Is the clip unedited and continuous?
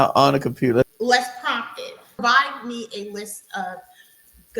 no; 2 cuts; at 0.9 s, 2.2 s

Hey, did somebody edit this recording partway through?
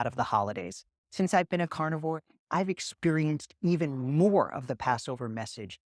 no; 0 cuts

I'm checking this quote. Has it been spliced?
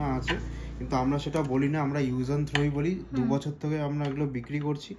no; 0 cuts

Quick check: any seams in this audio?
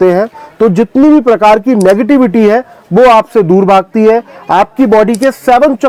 no; 0 cuts

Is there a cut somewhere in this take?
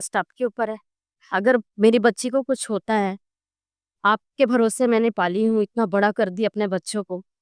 no; 0 cuts

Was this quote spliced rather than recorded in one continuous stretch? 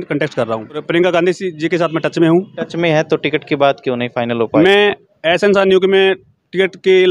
yes; 3 cuts; at 0.8 s, 2.6 s, 4.5 s

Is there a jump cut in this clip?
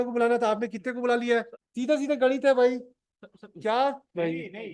yes; 1 cut; at 1.6 s

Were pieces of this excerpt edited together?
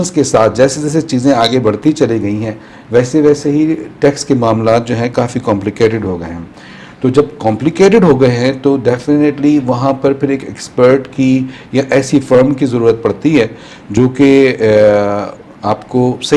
no; 0 cuts

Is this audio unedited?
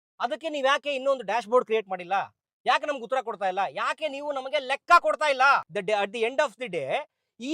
no; 1 cut; at 5.7 s

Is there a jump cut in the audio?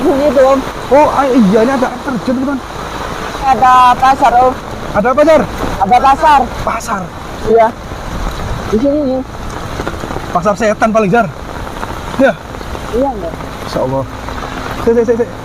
yes; 1 cut; at 3.5 s

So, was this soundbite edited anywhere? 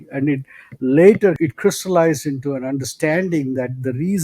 yes; 1 cut; at 1.4 s

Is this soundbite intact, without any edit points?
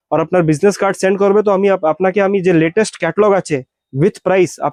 yes; 0 cuts

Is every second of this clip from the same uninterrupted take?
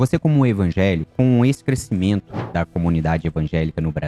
no; 2 cuts; at 1.1 s, 2.4 s

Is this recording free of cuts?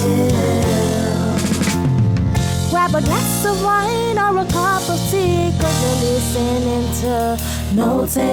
yes; 0 cuts

